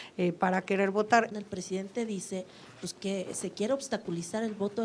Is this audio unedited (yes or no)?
no